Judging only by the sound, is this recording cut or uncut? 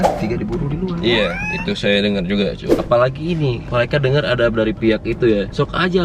cut